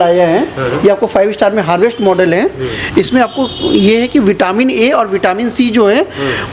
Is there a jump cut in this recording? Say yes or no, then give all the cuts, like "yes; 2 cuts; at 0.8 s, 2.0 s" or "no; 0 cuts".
no; 0 cuts